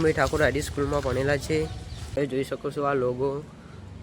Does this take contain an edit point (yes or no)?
yes